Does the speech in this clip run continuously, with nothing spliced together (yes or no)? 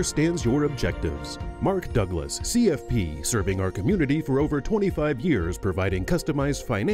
yes